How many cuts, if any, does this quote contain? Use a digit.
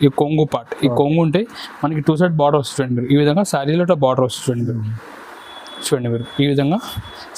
0